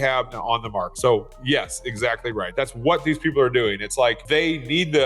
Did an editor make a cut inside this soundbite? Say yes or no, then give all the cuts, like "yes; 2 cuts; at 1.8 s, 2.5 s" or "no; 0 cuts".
yes; 3 cuts; at 0.9 s, 2.5 s, 4.2 s